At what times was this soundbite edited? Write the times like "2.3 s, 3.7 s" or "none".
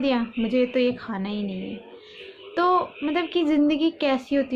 none